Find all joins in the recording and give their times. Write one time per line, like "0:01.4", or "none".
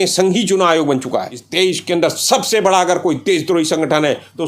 0:01.4